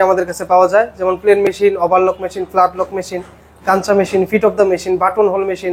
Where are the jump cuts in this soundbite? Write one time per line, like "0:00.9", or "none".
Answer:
none